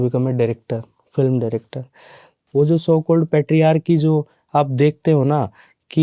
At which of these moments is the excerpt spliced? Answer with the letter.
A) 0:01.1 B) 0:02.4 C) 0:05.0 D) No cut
B